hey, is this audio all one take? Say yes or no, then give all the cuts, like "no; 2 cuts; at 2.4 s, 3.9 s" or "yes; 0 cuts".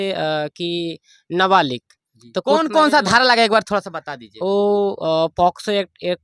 yes; 0 cuts